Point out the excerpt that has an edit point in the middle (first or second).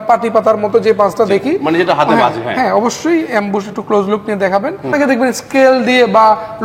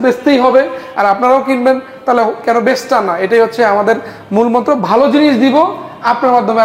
first